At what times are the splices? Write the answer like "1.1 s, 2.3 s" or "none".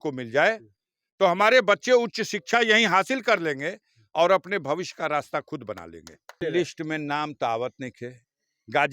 6.4 s